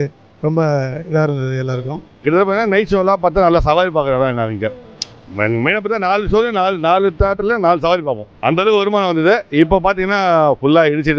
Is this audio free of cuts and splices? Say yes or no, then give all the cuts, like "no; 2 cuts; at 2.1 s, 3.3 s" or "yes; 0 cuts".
no; 2 cuts; at 2.2 s, 8.3 s